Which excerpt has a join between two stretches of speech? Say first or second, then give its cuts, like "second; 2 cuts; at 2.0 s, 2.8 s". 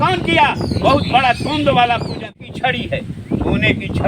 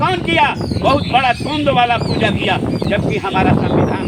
first; 1 cut; at 2.2 s